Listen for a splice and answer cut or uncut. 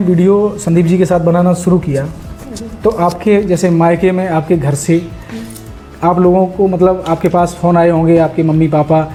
uncut